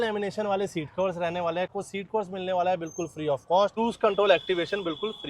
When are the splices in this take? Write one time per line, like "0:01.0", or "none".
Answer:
0:01.7
0:03.7

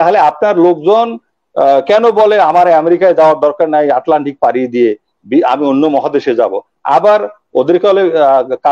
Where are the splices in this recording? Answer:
none

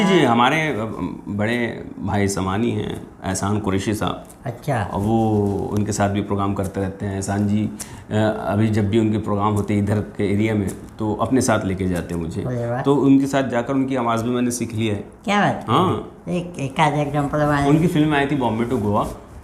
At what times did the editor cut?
none

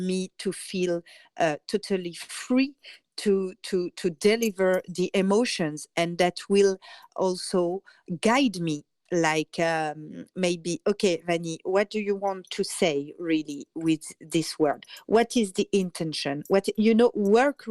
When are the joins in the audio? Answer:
0:07.0
0:08.0
0:08.9

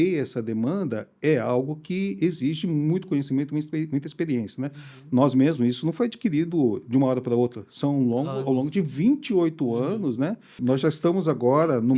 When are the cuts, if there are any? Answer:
0:10.9

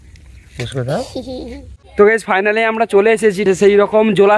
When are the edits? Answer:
0:01.9

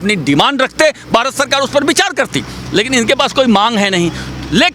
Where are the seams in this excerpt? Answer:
none

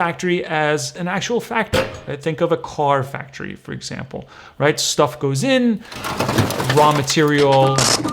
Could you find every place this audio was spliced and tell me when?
0:01.0

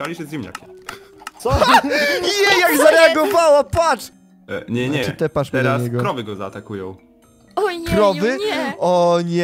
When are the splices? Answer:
0:04.1

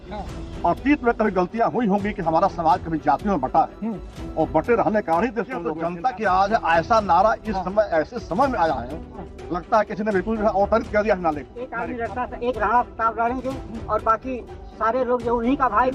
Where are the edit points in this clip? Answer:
0:05.6
0:11.6

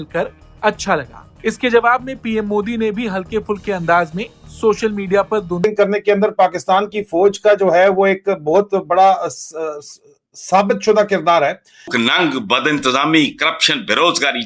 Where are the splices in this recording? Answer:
0:05.6
0:11.9

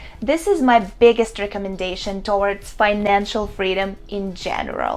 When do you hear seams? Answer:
none

